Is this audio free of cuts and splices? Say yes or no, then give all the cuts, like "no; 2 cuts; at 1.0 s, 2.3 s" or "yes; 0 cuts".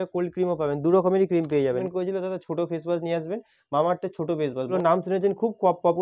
no; 2 cuts; at 1.8 s, 4.7 s